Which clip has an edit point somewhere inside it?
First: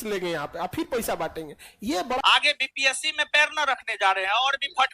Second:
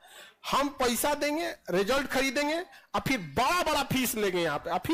first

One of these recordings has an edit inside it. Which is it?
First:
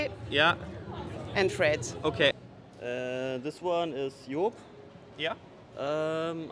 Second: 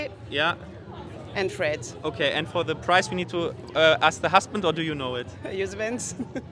first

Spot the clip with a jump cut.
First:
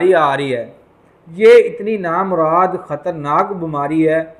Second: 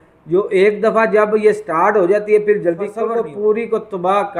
second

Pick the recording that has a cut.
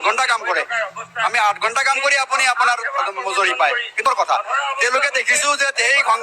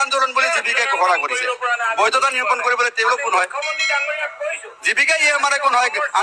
first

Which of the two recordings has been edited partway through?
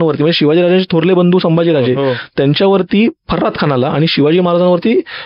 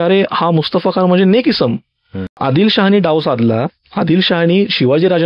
second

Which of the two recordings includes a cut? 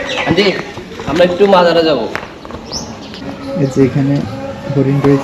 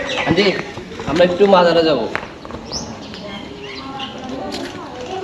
first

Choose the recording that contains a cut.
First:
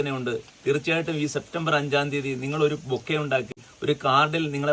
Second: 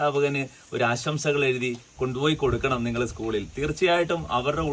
first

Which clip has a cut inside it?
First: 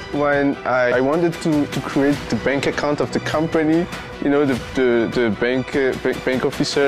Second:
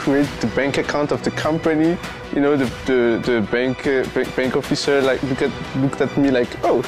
first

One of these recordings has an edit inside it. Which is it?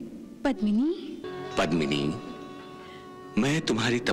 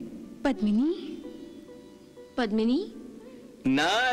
first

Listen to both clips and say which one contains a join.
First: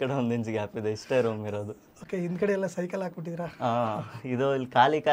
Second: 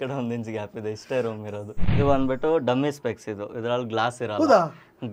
second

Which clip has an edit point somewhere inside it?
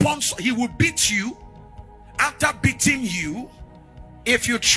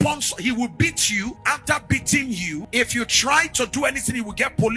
second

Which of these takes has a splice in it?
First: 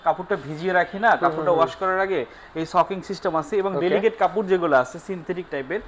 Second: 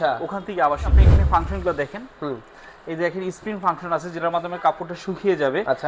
second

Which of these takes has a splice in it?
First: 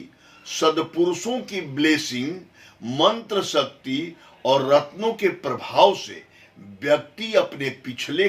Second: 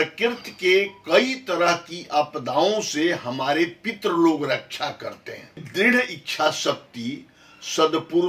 second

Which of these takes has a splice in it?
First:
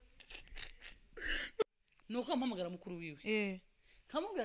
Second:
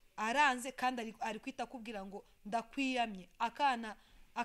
first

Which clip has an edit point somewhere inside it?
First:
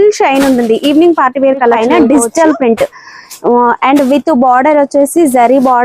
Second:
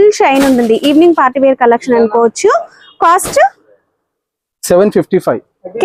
first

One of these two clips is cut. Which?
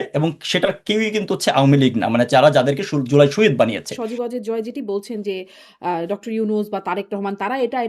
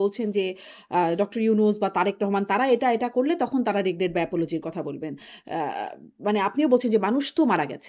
first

